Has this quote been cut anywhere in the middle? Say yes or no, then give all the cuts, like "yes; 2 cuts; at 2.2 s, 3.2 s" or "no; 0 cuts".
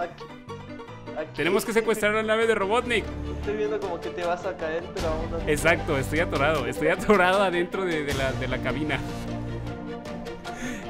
yes; 1 cut; at 3.1 s